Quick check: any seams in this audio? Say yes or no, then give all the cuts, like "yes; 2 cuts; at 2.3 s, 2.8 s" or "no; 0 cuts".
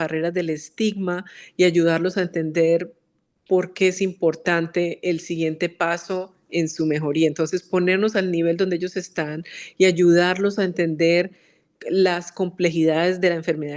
no; 0 cuts